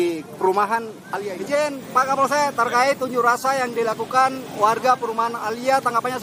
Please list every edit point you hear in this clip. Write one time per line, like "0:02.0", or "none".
0:01.0